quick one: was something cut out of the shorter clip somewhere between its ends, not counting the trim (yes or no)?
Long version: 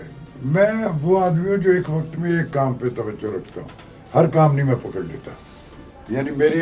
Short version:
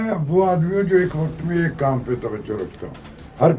no